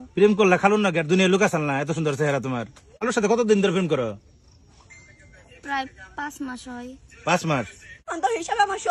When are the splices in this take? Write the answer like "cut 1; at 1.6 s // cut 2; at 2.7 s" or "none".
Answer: cut 1; at 3.1 s // cut 2; at 8.1 s